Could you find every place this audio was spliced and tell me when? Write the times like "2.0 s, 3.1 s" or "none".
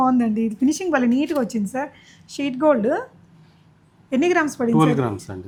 none